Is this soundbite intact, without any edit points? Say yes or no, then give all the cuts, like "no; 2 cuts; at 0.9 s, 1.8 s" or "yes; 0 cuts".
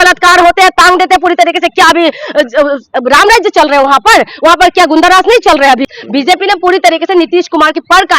no; 1 cut; at 5.9 s